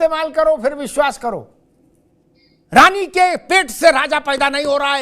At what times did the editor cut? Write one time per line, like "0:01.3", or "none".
0:01.6